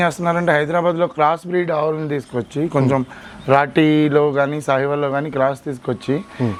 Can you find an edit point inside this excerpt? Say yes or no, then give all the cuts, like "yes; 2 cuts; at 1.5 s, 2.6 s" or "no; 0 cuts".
no; 0 cuts